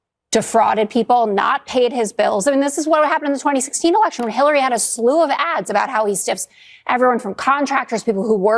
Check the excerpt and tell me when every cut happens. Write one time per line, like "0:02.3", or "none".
none

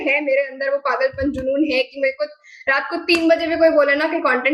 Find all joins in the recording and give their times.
none

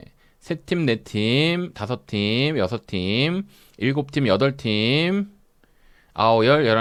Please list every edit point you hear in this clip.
none

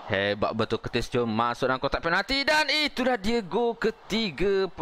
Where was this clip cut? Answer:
none

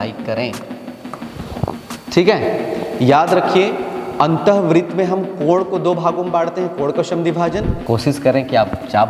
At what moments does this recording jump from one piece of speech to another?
0:07.8

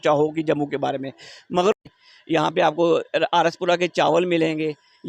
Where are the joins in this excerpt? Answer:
0:01.8

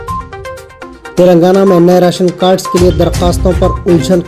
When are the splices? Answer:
0:01.0

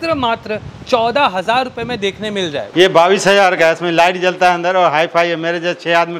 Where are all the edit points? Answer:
0:02.6

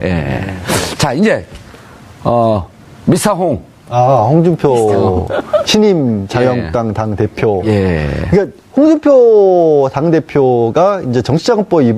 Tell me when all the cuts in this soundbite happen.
0:03.4

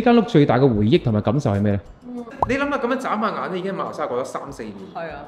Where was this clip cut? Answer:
0:02.3

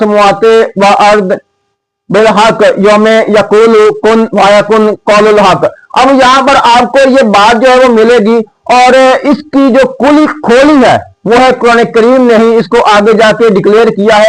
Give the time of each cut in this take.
none

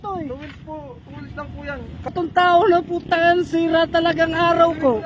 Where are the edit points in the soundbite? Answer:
0:02.1

